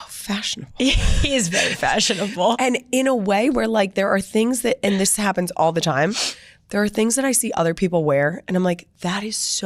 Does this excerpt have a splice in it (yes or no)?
no